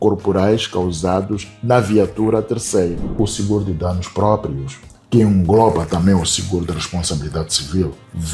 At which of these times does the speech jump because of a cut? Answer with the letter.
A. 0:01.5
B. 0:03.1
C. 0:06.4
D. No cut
B